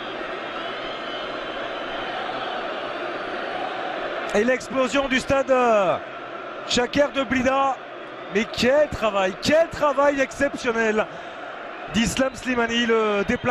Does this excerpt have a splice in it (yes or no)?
yes